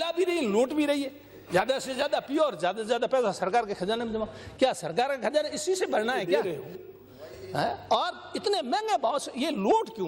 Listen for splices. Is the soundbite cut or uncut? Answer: cut